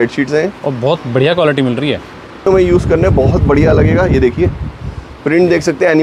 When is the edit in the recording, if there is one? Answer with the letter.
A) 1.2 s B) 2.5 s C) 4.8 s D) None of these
B